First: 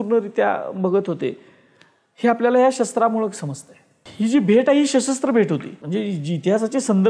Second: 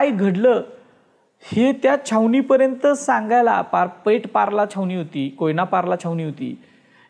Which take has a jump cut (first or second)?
first